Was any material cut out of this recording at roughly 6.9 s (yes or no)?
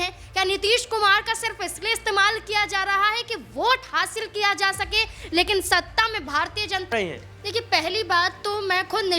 yes